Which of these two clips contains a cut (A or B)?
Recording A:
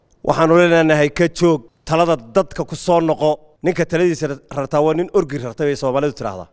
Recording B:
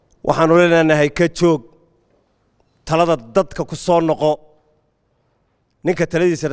A